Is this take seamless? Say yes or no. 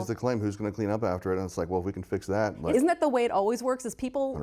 no